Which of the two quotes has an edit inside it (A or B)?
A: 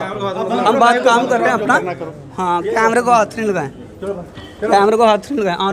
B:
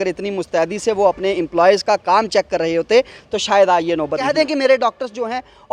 B